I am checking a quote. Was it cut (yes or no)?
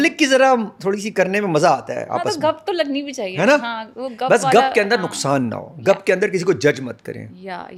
no